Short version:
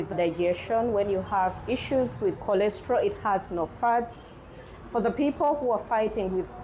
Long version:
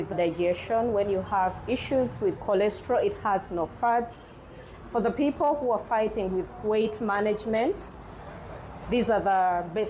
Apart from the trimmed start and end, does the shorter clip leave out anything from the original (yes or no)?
no